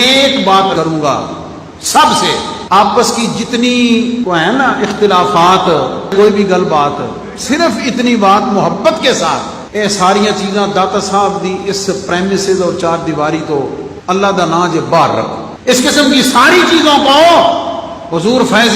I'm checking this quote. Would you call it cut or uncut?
uncut